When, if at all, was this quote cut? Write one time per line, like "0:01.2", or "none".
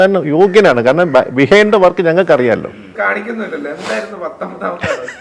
0:02.9